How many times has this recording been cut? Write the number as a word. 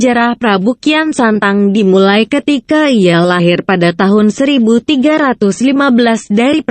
one